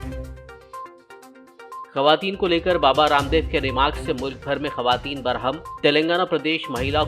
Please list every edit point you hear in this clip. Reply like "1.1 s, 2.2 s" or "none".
1.8 s